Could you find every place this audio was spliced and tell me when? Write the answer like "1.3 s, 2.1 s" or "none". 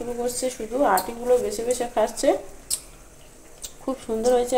none